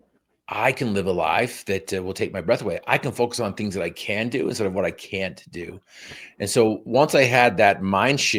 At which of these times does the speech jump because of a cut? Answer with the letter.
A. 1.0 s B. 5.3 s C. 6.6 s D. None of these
D